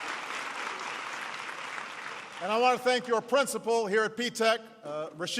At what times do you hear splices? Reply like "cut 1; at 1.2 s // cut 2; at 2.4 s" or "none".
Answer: cut 1; at 4.5 s